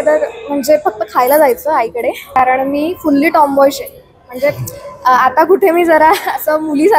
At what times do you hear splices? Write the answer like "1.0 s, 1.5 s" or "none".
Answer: 2.4 s